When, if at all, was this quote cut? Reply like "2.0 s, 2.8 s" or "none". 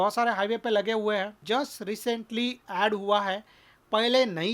1.4 s

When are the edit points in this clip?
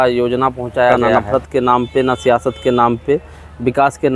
1.1 s

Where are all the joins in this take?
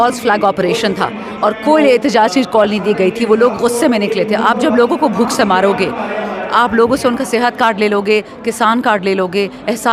none

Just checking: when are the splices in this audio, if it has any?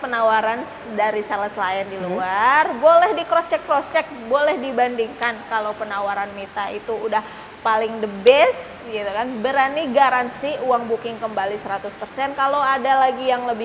none

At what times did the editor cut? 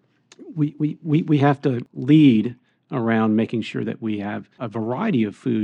4.6 s

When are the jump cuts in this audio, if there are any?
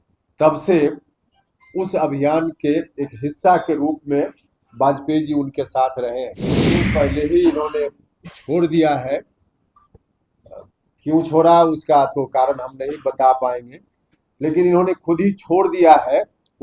6.8 s

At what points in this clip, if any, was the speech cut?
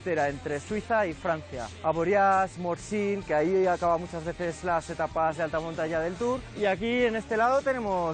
1.7 s

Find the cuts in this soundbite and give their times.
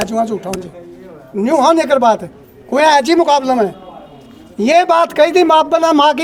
none

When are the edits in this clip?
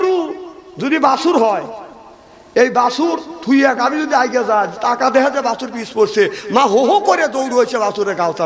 none

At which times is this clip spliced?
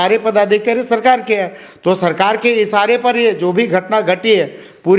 none

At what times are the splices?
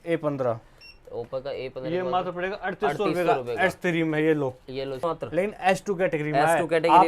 5.0 s

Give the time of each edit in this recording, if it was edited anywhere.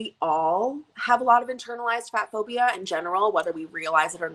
none

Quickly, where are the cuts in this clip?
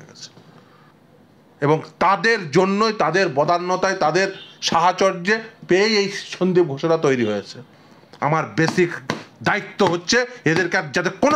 0.9 s

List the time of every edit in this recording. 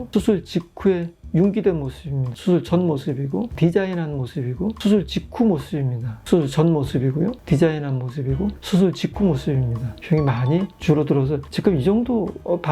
2.4 s, 6.2 s

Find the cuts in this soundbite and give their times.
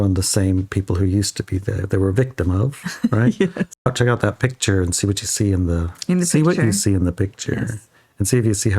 3.8 s

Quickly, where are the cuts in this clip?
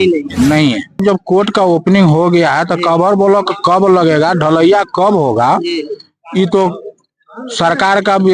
1.0 s

